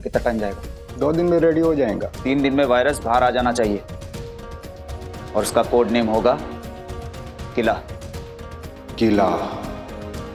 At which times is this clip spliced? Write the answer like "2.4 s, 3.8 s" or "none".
2.1 s